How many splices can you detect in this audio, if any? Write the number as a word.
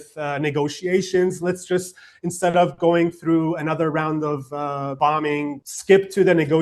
two